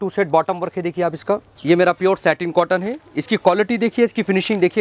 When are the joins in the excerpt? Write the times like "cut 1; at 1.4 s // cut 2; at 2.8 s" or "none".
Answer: cut 1; at 1.5 s